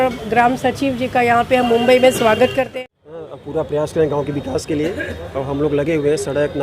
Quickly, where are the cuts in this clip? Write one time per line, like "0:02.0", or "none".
0:02.7